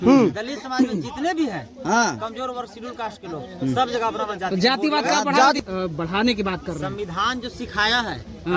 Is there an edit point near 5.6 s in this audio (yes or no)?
yes